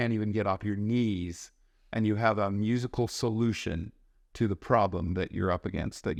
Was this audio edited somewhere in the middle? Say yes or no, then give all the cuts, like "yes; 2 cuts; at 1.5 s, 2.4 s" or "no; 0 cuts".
no; 0 cuts